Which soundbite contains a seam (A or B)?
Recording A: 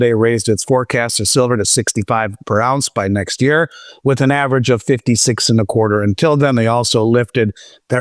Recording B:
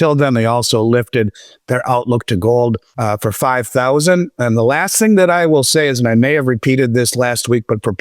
B